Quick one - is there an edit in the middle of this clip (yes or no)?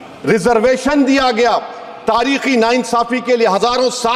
no